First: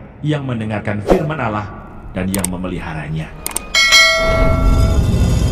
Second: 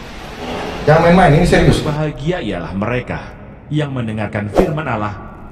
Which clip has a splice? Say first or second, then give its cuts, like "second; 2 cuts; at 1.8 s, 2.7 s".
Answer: second; 1 cut; at 1.9 s